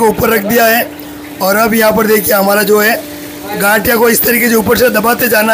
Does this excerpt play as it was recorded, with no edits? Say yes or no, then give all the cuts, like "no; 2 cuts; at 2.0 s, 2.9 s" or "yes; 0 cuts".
yes; 0 cuts